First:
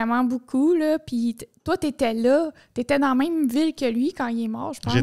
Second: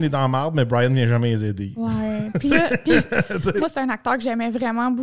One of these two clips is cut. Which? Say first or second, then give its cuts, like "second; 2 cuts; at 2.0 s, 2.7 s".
second; 1 cut; at 3.6 s